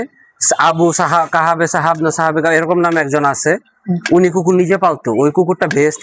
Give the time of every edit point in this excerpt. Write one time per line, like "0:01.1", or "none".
none